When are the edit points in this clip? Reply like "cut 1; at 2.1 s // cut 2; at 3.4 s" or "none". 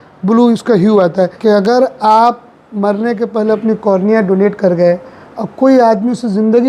cut 1; at 1.3 s